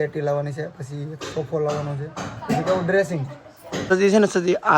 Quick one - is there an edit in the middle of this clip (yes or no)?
yes